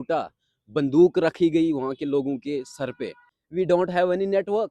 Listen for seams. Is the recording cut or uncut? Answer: cut